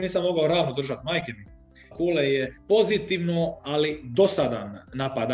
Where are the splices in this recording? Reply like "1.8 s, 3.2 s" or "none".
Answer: 1.9 s, 2.6 s